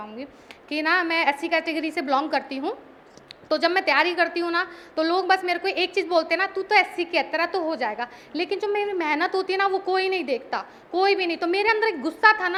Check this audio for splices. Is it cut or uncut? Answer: uncut